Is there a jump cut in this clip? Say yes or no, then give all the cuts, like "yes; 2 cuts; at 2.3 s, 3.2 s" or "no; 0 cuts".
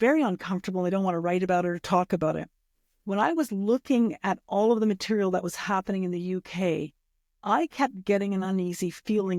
no; 0 cuts